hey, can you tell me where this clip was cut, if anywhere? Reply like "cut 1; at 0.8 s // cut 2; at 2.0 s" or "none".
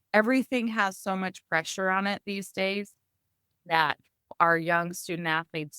cut 1; at 4.3 s